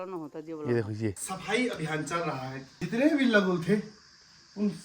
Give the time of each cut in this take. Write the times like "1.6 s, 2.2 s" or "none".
1.3 s, 2.8 s